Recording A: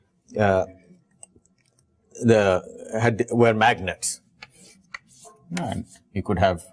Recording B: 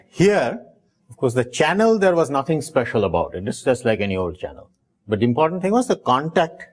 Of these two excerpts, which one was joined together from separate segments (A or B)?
B